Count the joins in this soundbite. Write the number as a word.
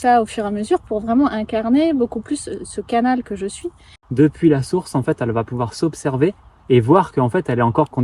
one